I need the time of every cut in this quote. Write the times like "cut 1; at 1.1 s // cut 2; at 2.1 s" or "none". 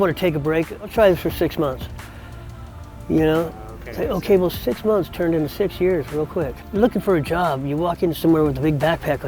cut 1; at 0.9 s // cut 2; at 6.6 s